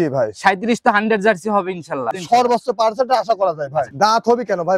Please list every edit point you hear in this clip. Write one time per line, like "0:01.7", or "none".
0:02.2
0:03.9